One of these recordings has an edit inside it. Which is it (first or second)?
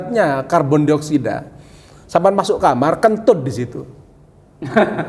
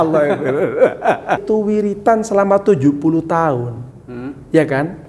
second